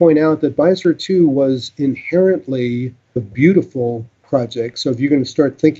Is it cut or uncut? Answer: cut